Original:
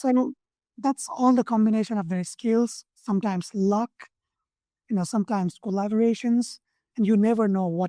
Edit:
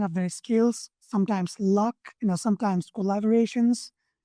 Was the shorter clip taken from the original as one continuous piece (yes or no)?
no